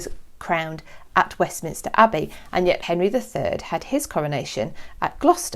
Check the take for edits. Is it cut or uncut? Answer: cut